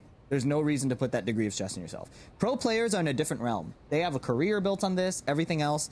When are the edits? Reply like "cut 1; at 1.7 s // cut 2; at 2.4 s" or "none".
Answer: none